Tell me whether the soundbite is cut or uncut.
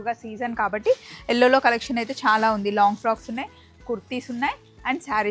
uncut